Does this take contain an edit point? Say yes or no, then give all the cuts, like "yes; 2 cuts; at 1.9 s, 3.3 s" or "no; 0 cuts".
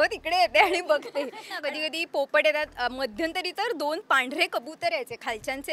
yes; 1 cut; at 1.5 s